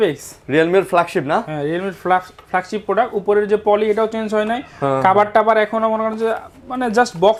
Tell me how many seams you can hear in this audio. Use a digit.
0